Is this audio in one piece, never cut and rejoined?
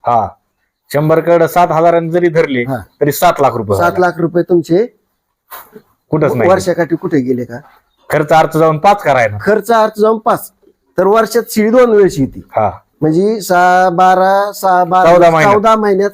yes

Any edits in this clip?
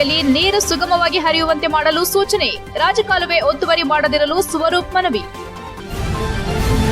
yes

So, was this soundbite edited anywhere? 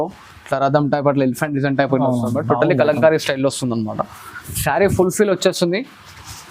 no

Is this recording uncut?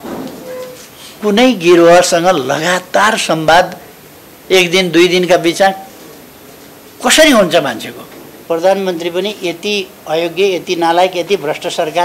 no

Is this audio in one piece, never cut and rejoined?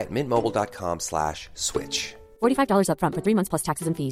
yes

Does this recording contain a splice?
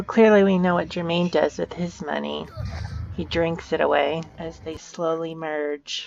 yes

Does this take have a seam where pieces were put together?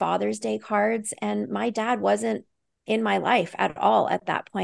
no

